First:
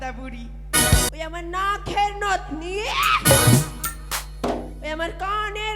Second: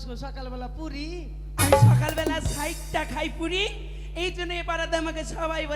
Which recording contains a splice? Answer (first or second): first